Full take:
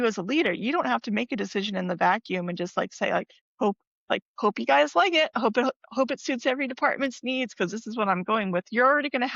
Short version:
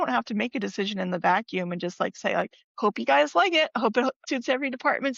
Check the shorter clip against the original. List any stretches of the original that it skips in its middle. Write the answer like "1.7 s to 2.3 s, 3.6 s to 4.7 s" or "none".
3.5 s to 4.3 s, 5.8 s to 6.2 s